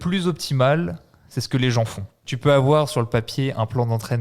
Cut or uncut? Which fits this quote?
cut